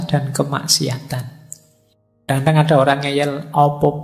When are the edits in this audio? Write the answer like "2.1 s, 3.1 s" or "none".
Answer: 2.3 s